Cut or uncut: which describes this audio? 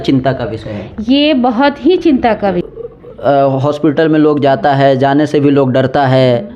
cut